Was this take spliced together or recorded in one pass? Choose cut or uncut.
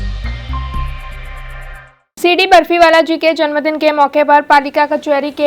cut